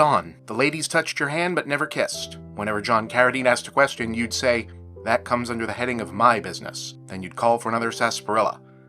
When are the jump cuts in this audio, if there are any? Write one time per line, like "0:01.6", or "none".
none